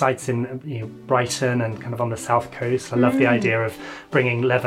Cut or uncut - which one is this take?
uncut